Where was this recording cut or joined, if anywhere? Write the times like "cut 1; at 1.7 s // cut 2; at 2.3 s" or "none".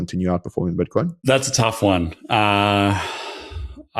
cut 1; at 1.2 s